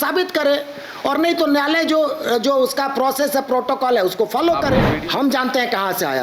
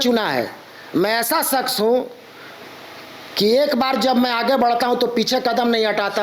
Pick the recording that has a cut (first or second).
first